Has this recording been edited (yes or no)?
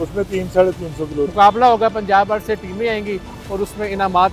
yes